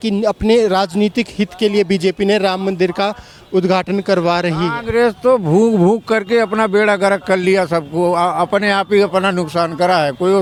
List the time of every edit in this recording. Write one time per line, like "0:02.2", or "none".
none